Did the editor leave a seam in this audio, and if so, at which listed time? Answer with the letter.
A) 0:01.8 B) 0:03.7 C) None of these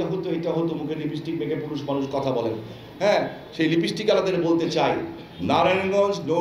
C